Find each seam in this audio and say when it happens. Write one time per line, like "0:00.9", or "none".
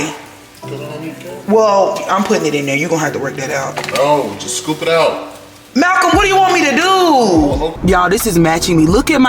0:07.7